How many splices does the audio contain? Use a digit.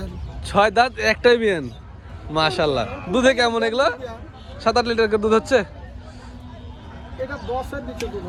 0